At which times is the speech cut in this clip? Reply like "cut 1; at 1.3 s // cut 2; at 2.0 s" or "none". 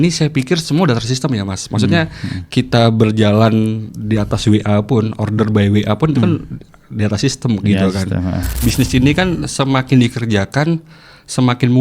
cut 1; at 8.6 s